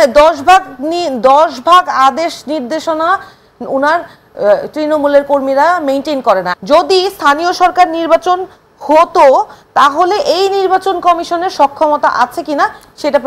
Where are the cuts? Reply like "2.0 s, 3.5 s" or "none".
6.5 s